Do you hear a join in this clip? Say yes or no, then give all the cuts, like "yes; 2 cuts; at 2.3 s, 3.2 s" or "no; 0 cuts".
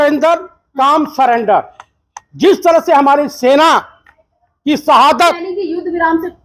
yes; 1 cut; at 5.4 s